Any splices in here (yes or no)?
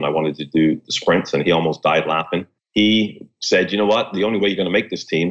yes